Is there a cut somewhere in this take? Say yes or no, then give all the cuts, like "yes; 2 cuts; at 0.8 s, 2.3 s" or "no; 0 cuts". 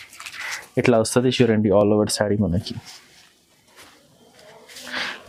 no; 0 cuts